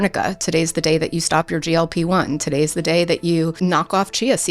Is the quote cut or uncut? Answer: cut